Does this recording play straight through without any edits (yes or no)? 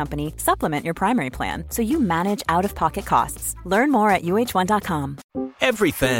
no